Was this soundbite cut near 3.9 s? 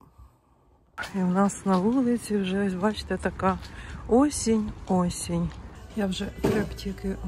no; 1 cut; at 5.8 s

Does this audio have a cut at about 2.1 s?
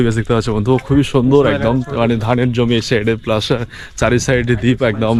no; 0 cuts

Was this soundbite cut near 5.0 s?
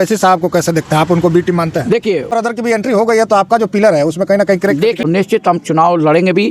yes; 2 cuts; at 2.3 s, 5.0 s

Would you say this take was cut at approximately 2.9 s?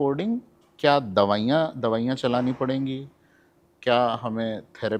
no; 0 cuts

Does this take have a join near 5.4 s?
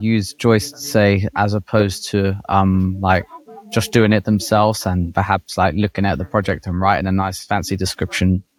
no; 0 cuts

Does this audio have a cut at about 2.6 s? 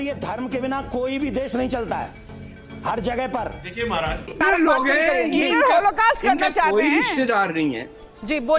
no; 1 cut; at 4.3 s

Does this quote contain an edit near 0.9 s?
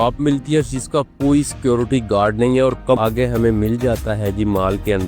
no; 1 cut; at 3.0 s

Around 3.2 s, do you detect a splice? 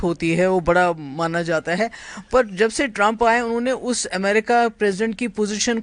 no; 0 cuts

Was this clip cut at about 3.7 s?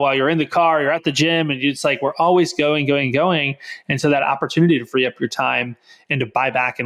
no; 0 cuts

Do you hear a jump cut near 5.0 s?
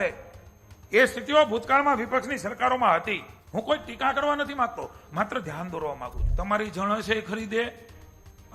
no; 2 cuts; at 3.3 s, 6.2 s

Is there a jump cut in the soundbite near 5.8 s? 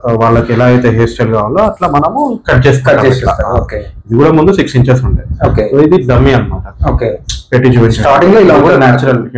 no; 0 cuts

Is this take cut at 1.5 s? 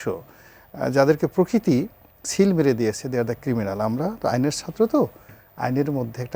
no; 0 cuts

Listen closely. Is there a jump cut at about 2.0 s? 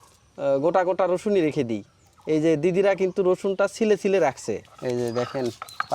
no; 1 cut; at 4.7 s

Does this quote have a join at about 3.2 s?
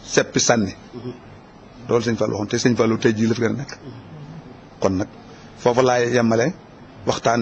no; 1 cut; at 6.4 s

